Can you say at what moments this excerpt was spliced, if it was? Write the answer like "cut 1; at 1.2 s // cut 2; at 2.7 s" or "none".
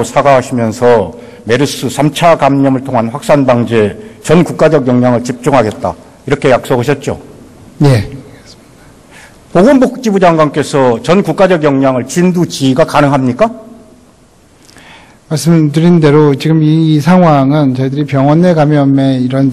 cut 1; at 1.7 s